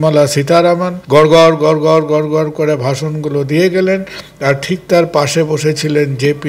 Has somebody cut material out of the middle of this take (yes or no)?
yes